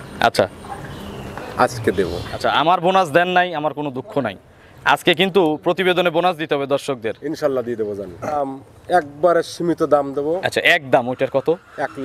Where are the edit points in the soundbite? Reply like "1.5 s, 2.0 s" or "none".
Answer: 2.3 s, 8.4 s